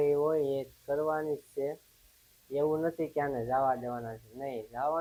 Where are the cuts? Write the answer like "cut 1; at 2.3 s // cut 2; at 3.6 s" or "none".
none